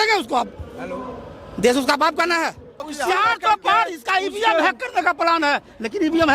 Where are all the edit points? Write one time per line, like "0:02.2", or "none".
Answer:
0:02.8